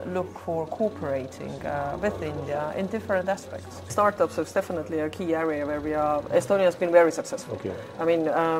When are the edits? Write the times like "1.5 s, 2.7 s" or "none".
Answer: 3.9 s